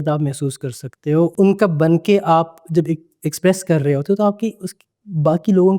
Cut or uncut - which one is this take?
cut